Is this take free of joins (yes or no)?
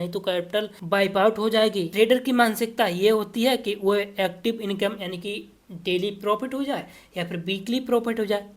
no